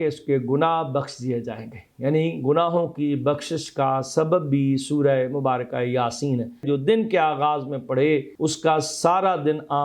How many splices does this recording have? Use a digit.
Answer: 2